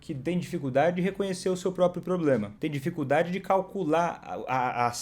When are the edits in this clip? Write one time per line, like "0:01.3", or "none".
0:02.5